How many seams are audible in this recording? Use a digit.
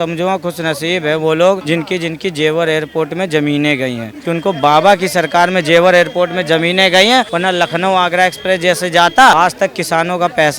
4